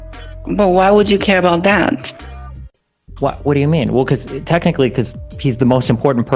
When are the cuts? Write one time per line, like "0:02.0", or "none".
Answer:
none